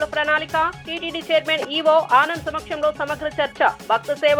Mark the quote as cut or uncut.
uncut